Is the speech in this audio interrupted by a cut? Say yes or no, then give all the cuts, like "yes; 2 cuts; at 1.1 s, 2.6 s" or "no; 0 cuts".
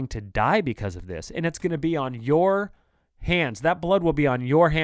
no; 0 cuts